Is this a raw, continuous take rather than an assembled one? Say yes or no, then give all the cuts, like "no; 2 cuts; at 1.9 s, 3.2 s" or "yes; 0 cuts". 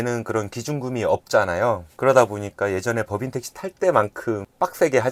yes; 0 cuts